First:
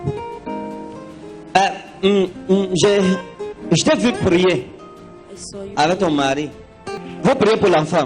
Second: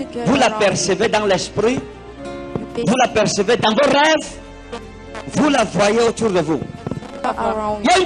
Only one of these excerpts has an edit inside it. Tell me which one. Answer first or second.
first